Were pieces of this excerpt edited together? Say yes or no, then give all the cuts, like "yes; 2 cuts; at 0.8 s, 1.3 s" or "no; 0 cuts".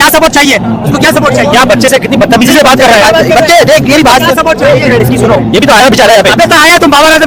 no; 0 cuts